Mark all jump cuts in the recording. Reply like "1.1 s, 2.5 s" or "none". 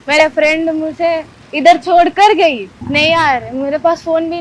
2.7 s